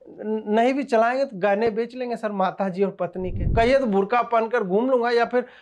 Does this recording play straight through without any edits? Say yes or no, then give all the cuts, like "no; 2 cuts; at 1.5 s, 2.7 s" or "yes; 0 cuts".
no; 1 cut; at 3.4 s